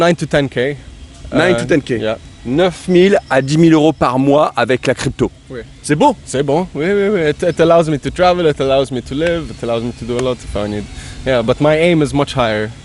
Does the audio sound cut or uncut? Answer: uncut